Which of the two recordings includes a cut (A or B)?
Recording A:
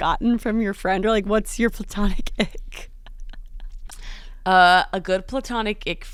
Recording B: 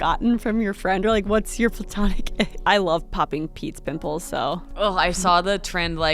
B